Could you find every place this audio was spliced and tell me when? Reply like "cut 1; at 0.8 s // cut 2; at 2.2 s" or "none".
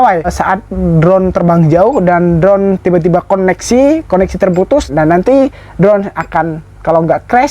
cut 1; at 4.9 s